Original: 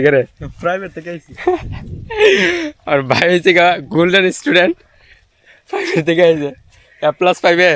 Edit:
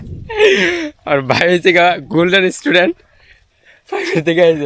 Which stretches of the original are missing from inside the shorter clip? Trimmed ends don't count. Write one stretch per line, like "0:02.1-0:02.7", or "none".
none